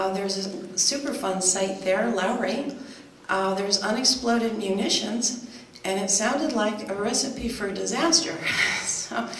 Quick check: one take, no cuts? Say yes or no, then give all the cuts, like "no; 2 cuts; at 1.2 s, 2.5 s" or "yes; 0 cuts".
no; 1 cut; at 6.5 s